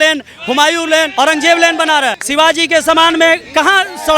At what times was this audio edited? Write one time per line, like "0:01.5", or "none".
0:01.1
0:02.2